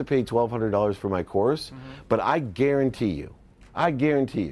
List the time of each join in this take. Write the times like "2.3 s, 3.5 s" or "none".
none